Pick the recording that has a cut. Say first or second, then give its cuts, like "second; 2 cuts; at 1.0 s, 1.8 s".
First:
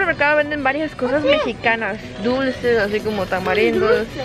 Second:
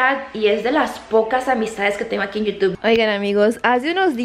second; 1 cut; at 2.7 s